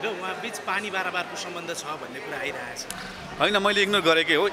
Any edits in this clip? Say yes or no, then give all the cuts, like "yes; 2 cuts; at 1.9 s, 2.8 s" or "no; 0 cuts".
yes; 1 cut; at 2.9 s